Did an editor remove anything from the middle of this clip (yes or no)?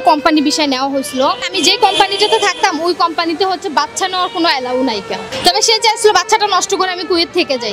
yes